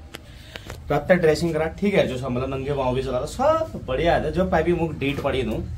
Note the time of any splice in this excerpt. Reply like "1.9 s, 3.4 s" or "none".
none